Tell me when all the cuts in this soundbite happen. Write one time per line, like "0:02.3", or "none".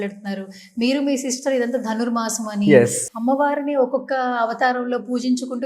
0:03.0